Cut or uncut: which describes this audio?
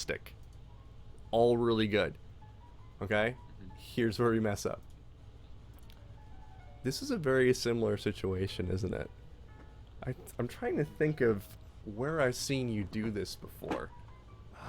cut